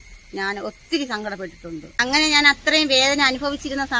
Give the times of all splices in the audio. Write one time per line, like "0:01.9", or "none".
0:01.9